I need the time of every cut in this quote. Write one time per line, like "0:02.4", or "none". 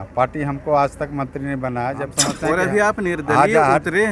0:02.2